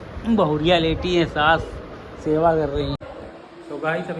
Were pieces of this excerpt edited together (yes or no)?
yes